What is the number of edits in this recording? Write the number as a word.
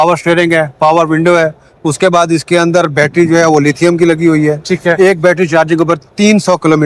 zero